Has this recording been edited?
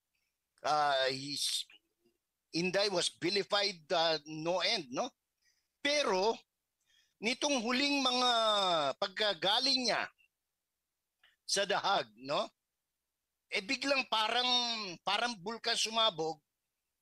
no; 0 cuts

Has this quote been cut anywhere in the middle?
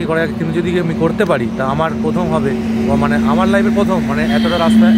no; 0 cuts

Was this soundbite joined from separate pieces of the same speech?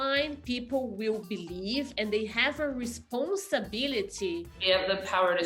yes; 1 cut; at 4.5 s

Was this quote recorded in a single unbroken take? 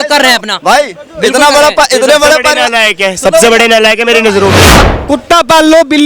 no; 1 cut; at 4.6 s

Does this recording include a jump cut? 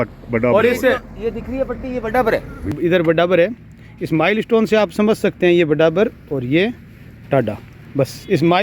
yes; 1 cut; at 2.8 s

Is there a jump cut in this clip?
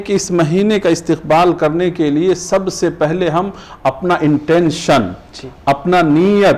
no; 0 cuts

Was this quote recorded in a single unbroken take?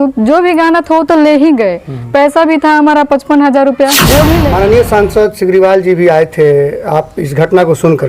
no; 1 cut; at 4.4 s

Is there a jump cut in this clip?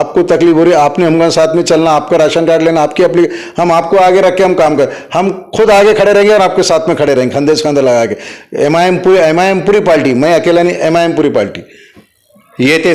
no; 0 cuts

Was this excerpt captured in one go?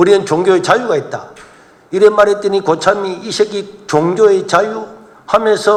yes; 0 cuts

